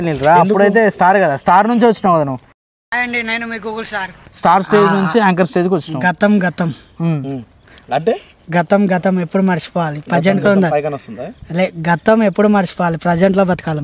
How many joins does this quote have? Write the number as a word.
one